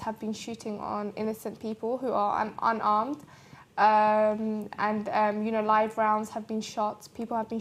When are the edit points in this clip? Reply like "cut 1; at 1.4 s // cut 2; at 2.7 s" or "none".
cut 1; at 4.5 s

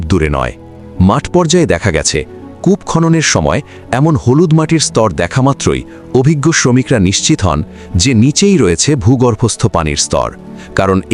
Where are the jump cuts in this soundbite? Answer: none

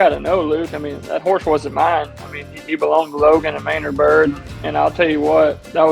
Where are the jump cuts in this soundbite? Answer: cut 1; at 4.5 s

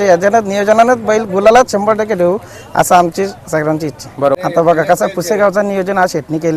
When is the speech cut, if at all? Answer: cut 1; at 4.4 s

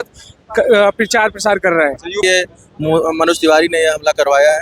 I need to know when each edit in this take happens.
cut 1; at 2.1 s

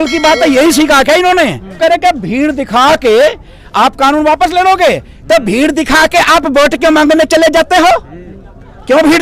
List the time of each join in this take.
cut 1; at 1.8 s

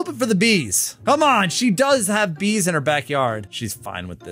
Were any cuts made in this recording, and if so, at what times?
none

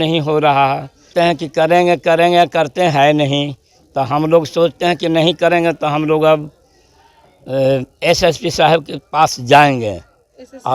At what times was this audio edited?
cut 1; at 1.1 s

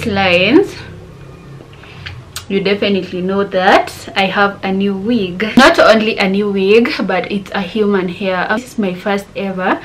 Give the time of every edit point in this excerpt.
cut 1; at 8.6 s

